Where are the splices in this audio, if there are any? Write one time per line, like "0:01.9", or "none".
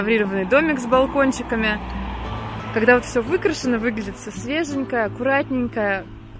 none